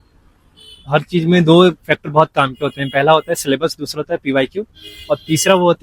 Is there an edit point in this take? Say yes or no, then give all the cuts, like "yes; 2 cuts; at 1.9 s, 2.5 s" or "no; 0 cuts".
no; 0 cuts